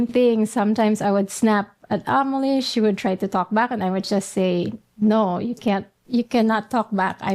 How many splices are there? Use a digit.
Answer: 1